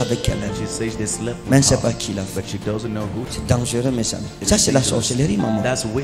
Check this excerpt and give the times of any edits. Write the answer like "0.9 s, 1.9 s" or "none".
3.3 s